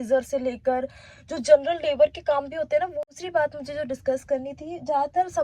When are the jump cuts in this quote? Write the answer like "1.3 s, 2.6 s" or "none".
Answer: 3.1 s

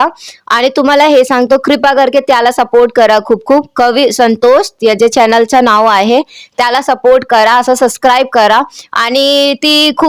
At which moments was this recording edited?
none

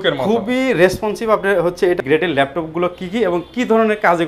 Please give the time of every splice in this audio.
2.0 s

